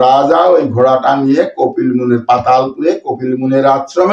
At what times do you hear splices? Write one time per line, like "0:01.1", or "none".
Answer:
none